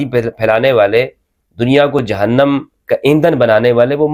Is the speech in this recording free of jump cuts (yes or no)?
yes